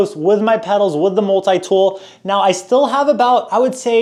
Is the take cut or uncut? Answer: uncut